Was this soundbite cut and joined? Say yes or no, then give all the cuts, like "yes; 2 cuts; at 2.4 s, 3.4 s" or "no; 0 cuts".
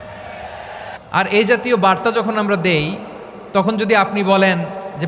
yes; 1 cut; at 0.9 s